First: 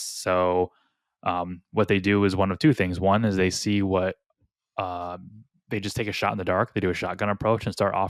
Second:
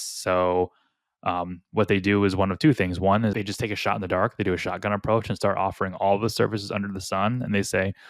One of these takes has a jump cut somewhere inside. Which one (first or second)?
second